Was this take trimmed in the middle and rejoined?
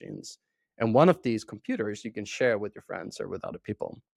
no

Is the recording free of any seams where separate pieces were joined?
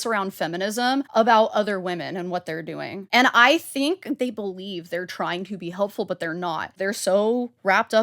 no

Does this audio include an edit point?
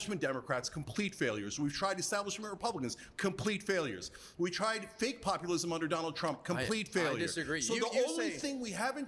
no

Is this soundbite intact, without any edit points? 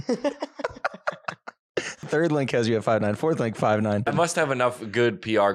no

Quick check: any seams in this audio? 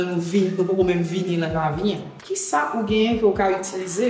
yes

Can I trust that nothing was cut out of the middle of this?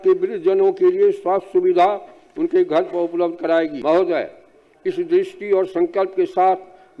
no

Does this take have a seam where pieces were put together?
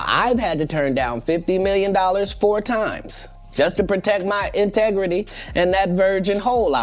no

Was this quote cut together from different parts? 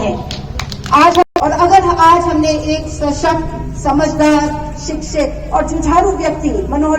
yes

